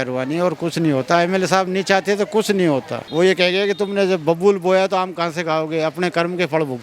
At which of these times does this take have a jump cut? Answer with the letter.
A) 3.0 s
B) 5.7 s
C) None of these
A